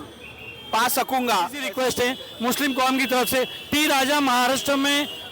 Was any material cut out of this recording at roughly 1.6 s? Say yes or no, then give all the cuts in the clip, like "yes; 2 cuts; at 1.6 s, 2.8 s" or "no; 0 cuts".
yes; 1 cut; at 1.6 s